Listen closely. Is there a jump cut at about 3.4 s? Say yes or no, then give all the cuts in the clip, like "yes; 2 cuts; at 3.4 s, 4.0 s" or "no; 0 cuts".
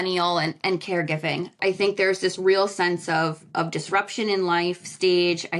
no; 1 cut; at 1.6 s